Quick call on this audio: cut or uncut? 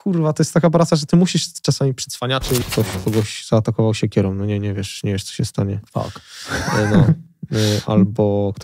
cut